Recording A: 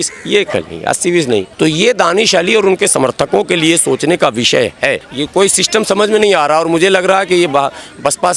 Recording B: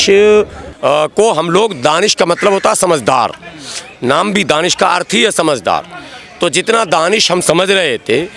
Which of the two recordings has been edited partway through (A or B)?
A